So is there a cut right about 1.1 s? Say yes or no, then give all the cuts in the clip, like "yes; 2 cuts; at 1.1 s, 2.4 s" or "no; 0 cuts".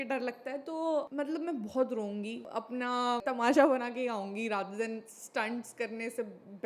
yes; 2 cuts; at 1.1 s, 2.8 s